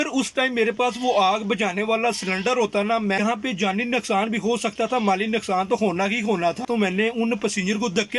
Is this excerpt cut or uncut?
cut